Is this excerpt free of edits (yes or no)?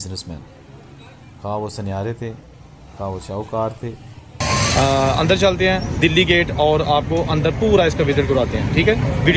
no